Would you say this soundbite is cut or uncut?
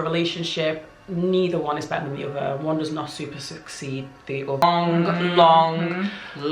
cut